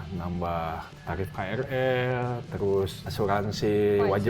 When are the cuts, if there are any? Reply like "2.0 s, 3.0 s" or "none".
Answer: 0.9 s, 3.0 s